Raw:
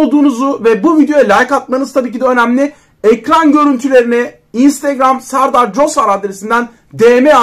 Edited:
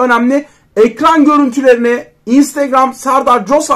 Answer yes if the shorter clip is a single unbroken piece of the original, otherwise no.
yes